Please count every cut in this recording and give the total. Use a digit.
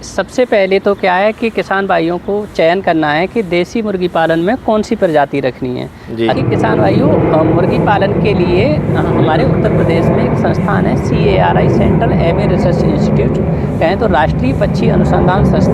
1